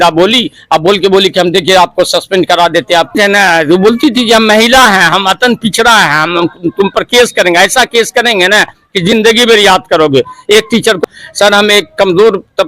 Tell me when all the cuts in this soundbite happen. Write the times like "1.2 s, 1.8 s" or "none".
3.1 s, 11.0 s